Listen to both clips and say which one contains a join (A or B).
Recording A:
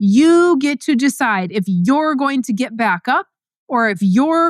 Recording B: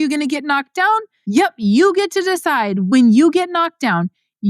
B